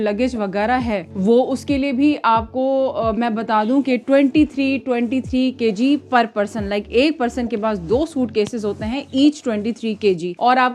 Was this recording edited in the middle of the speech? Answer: no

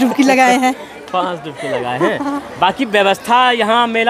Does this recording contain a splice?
no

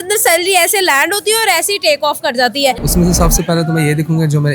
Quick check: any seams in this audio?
yes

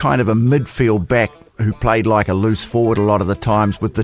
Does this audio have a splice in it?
no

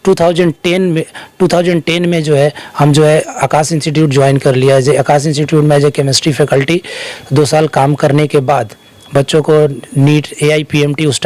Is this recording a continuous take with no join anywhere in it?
yes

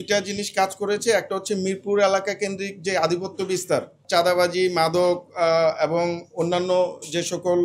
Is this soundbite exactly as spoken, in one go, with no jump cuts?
no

